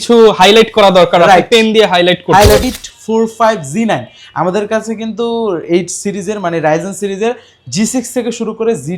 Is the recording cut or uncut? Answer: cut